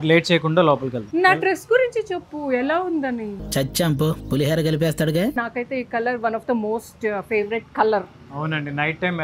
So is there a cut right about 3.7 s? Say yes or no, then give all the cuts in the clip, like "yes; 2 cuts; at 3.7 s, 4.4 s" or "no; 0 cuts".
no; 1 cut; at 5.4 s